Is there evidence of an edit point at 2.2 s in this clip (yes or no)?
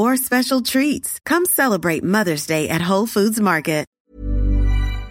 no